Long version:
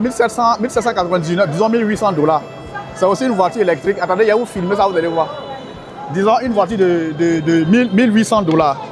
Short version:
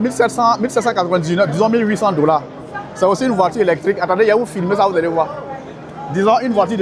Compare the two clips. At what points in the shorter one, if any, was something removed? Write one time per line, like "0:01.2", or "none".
none